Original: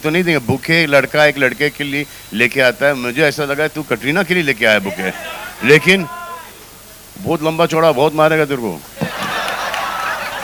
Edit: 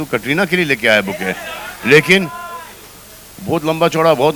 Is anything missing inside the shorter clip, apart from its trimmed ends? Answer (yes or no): no